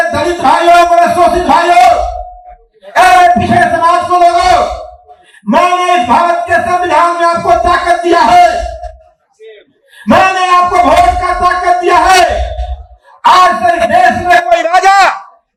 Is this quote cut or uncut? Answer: uncut